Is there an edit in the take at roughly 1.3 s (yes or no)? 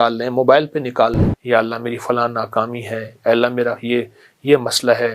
yes